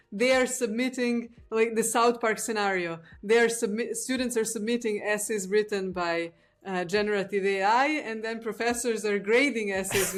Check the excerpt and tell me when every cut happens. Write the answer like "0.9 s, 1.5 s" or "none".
none